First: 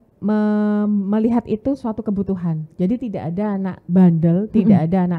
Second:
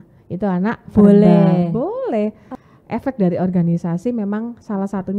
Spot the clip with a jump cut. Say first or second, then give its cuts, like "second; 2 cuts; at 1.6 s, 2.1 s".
second; 1 cut; at 2.5 s